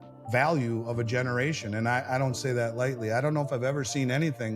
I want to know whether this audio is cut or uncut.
uncut